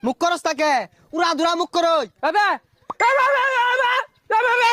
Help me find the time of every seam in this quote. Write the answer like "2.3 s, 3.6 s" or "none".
none